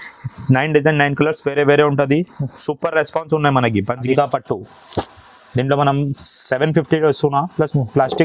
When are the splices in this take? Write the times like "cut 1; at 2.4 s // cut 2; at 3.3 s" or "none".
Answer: cut 1; at 4.1 s